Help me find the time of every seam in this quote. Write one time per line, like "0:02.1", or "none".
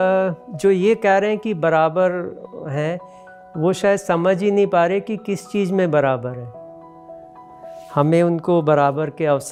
none